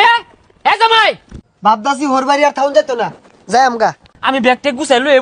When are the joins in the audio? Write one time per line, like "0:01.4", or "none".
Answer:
0:01.3
0:04.1